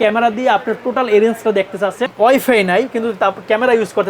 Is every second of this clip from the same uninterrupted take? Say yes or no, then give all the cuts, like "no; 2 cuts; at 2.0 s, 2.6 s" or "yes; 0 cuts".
no; 1 cut; at 2.1 s